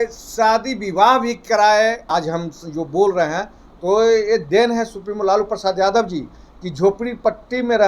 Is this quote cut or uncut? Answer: cut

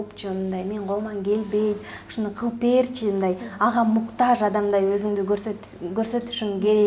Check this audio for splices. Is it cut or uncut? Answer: uncut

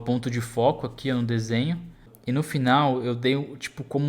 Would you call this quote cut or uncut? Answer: cut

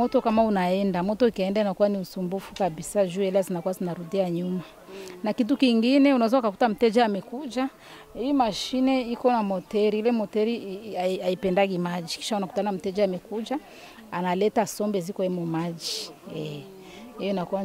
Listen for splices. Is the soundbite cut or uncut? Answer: uncut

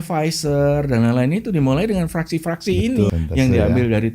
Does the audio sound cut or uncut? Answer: cut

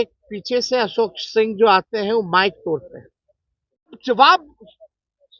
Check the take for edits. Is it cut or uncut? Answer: cut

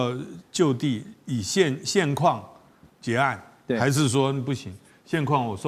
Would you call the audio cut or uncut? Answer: uncut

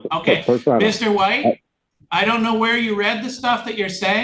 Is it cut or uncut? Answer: uncut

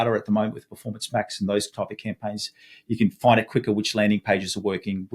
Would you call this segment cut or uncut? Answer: uncut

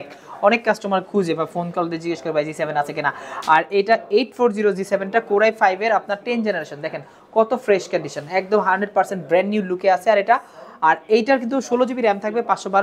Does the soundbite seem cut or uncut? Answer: uncut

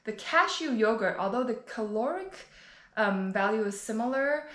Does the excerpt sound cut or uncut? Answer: uncut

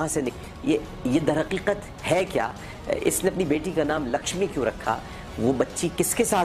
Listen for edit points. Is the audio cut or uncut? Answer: uncut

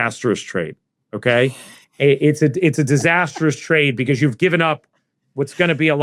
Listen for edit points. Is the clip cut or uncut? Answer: uncut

